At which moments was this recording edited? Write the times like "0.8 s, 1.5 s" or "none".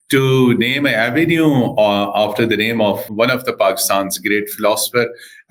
none